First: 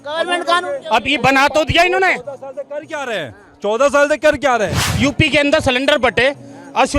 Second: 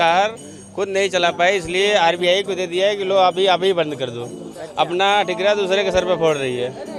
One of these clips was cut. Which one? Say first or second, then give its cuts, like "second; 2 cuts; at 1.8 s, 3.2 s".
first; 1 cut; at 4.8 s